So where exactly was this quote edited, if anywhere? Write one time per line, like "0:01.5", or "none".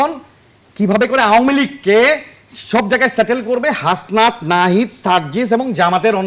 none

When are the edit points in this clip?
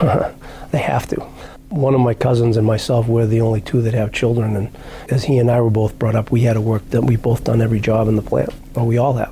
none

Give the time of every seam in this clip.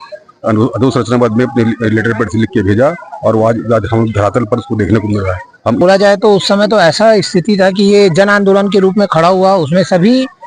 0:05.8

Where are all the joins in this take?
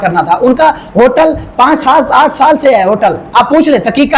none

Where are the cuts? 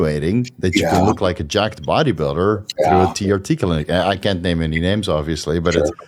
none

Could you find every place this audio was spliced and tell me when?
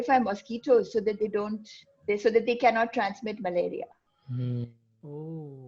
none

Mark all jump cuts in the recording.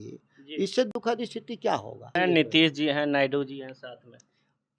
0:02.1

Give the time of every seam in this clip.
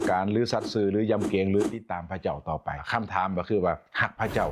0:02.8

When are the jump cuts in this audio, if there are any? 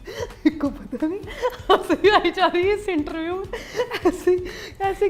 none

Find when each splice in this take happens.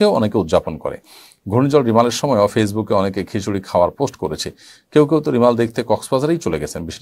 none

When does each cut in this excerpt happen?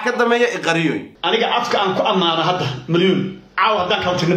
0:01.1

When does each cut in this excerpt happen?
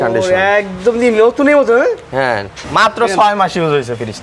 0:02.6

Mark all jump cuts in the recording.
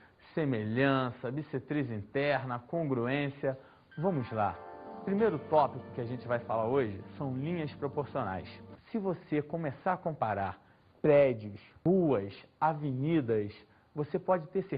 0:01.2

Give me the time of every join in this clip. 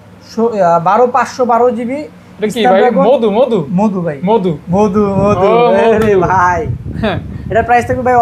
none

